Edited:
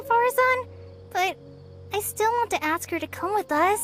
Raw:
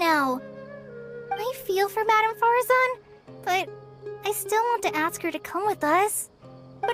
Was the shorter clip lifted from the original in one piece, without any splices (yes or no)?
yes